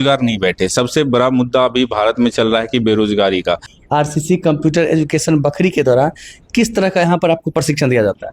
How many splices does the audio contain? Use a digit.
1